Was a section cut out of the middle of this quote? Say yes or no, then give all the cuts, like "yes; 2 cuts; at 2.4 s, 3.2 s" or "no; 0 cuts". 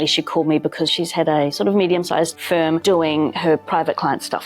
yes; 2 cuts; at 0.9 s, 2.4 s